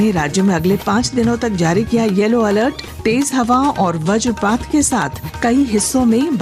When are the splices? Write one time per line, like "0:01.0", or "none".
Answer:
0:02.9
0:05.2